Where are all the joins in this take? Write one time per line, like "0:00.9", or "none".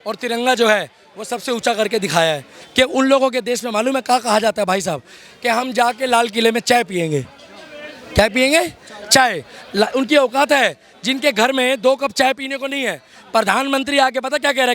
0:02.6
0:05.2